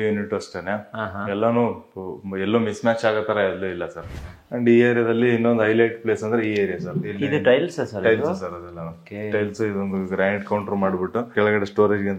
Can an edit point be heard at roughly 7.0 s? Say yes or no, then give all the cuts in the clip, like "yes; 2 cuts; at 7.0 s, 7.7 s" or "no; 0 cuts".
yes; 3 cuts; at 4.0 s, 7.0 s, 11.3 s